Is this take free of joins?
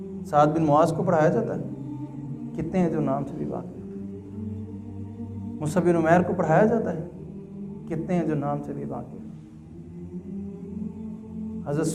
yes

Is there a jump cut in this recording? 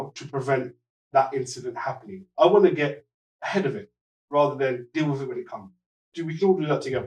yes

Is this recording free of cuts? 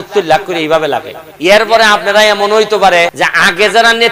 no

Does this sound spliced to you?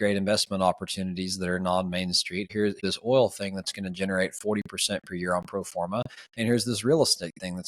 yes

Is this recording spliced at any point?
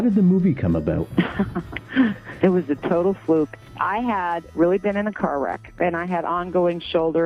yes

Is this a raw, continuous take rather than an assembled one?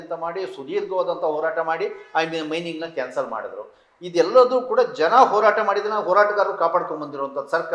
yes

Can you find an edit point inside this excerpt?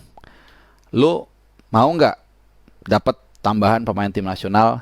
no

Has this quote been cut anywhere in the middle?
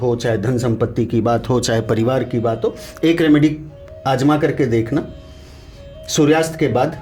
no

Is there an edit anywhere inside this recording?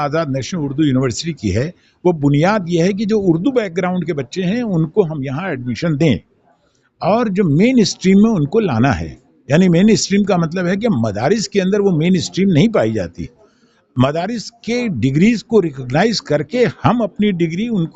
no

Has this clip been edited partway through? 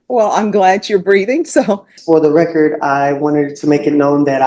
yes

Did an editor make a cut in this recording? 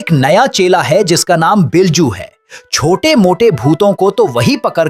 no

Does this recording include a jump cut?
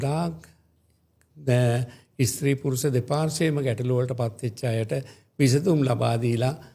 no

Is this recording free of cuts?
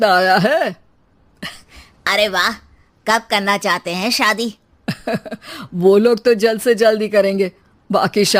yes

